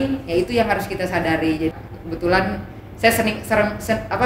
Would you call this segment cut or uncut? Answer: cut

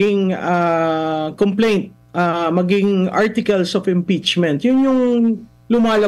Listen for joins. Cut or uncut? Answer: uncut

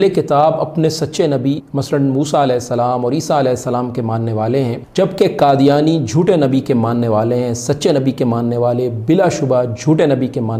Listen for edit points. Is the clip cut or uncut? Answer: cut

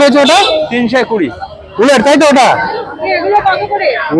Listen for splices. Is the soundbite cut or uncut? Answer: uncut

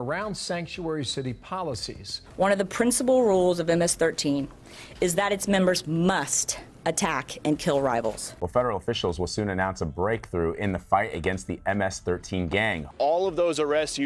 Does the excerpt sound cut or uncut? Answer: cut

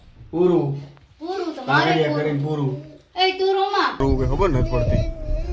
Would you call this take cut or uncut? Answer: cut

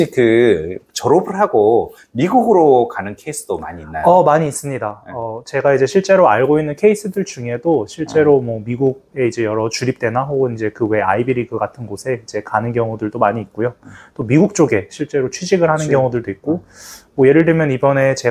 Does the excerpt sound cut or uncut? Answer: uncut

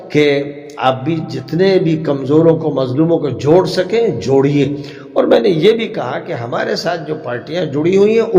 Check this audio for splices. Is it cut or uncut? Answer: uncut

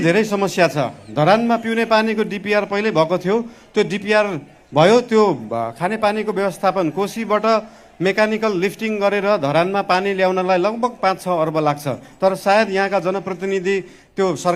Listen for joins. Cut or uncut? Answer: uncut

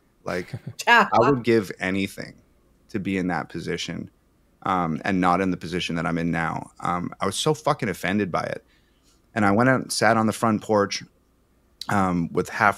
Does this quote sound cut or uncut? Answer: uncut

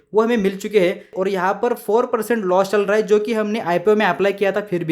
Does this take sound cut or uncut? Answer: cut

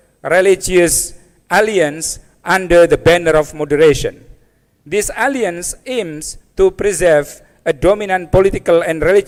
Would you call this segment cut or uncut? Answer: uncut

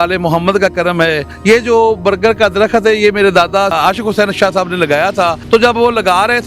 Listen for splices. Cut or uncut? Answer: cut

